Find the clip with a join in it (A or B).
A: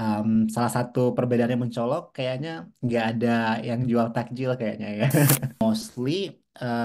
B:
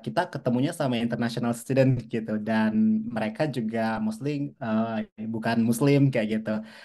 A